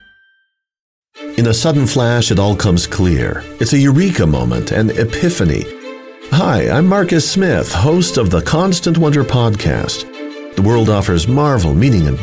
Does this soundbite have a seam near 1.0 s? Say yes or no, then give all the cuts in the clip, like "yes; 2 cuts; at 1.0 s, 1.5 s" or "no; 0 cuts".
yes; 1 cut; at 1.0 s